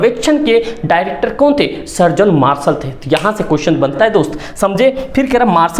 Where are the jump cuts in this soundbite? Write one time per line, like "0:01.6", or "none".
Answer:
none